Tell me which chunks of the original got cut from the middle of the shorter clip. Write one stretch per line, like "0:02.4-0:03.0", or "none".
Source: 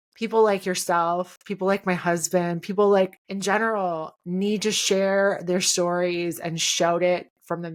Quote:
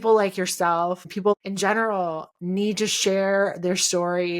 0:01.6-0:03.1